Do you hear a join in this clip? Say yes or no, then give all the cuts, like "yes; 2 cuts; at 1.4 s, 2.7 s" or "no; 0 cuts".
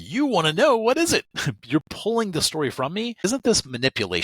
yes; 1 cut; at 3.2 s